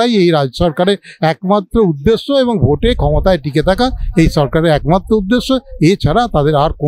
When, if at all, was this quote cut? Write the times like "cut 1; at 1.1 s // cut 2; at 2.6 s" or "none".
none